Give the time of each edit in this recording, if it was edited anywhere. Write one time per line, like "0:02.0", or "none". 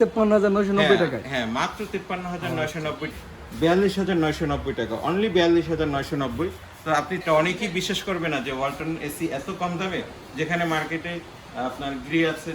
0:03.1
0:07.2